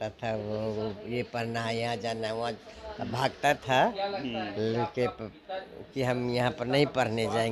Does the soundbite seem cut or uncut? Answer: uncut